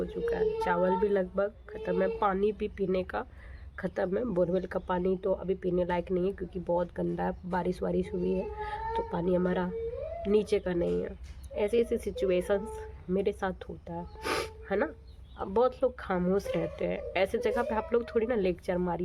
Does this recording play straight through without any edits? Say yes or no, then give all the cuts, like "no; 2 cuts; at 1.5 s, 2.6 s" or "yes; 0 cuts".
yes; 0 cuts